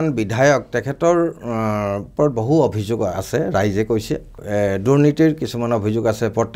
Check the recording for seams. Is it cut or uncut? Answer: cut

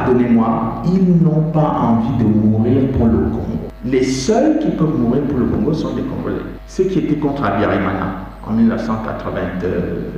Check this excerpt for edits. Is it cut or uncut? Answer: cut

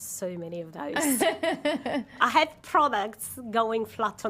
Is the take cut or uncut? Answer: uncut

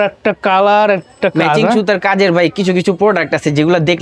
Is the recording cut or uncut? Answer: uncut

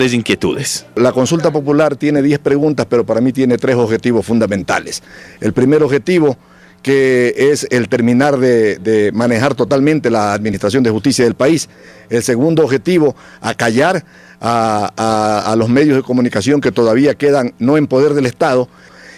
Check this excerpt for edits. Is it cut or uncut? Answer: cut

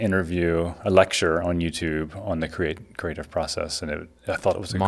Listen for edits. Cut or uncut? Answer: uncut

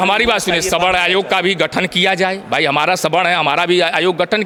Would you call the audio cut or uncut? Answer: uncut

